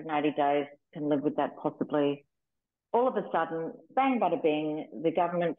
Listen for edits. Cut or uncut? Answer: cut